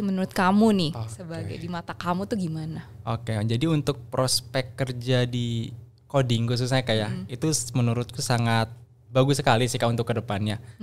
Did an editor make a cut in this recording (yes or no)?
no